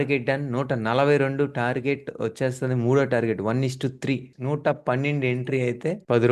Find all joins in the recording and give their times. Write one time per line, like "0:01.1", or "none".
0:04.3